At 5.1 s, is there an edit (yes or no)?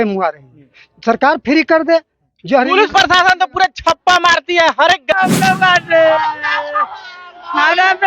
yes